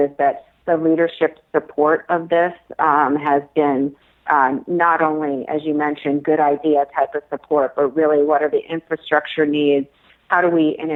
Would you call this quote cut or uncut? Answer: uncut